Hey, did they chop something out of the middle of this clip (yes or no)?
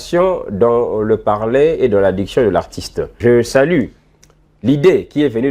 yes